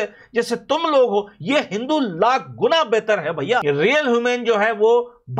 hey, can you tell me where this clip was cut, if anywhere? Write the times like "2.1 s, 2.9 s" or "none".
3.6 s